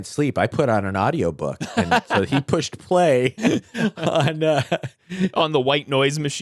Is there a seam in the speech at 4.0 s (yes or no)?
no